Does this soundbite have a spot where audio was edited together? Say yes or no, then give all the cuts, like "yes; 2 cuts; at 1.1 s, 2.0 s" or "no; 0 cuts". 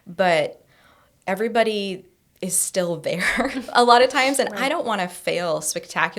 no; 0 cuts